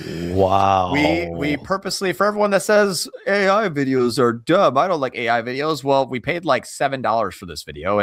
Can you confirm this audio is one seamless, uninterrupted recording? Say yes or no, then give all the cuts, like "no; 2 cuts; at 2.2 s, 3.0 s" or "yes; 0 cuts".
yes; 0 cuts